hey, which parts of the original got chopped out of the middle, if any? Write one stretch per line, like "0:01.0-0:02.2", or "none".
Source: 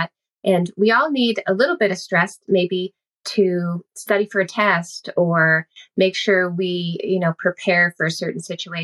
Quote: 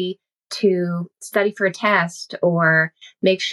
none

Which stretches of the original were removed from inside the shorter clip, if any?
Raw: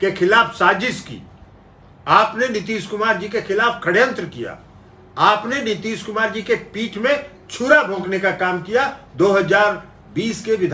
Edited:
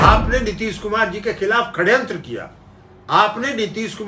none

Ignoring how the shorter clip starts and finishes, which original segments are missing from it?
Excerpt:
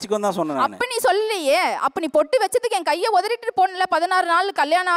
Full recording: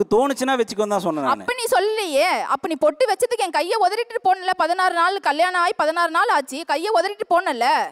none

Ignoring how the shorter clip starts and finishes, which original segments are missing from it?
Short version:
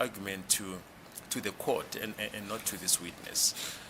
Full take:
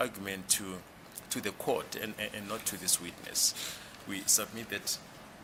none

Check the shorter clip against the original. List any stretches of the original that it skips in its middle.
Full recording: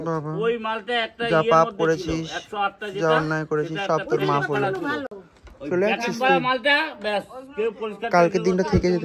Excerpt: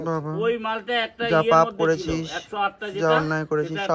none

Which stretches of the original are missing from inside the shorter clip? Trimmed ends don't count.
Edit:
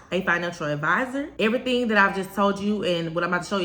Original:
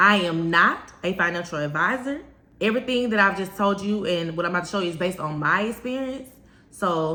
0:02.2-0:02.5

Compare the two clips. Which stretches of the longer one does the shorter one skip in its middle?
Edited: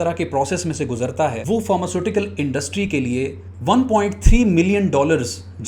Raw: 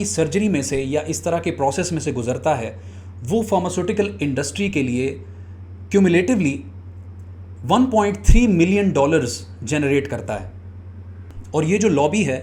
0:02.7-0:03.2
0:05.3-0:07.5

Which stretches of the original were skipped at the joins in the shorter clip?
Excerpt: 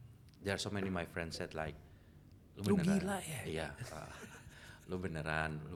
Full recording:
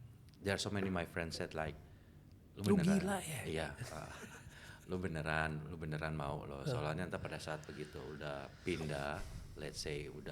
none

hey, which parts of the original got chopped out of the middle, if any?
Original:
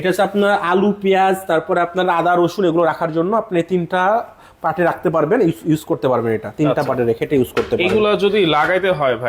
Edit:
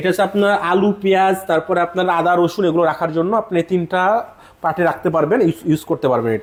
none

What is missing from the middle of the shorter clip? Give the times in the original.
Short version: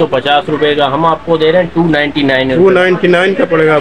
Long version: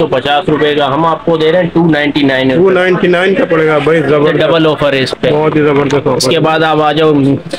none

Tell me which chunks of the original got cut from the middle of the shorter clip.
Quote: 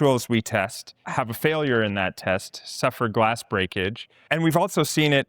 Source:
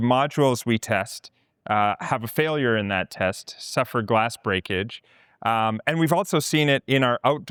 0:01.4-0:02.0
0:05.2-0:05.8

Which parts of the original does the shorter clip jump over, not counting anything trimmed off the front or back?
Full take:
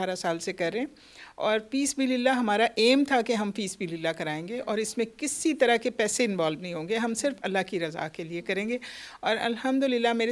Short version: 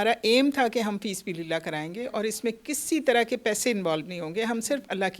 none

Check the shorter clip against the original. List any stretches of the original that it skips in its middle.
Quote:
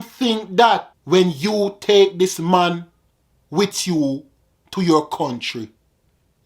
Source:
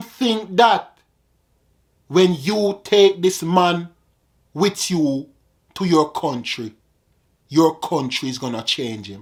0:00.9-0:02.0

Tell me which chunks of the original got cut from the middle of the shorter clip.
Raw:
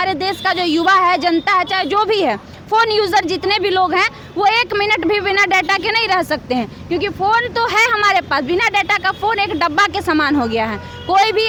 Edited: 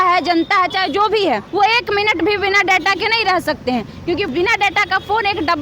0:02.4-0:04.3
0:07.1-0:08.4

